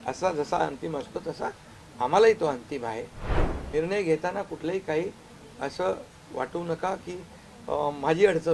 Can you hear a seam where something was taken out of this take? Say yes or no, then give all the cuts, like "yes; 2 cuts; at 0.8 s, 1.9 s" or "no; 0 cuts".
yes; 1 cut; at 3.4 s